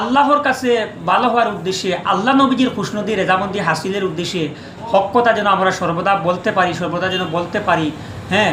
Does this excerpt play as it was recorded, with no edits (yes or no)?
yes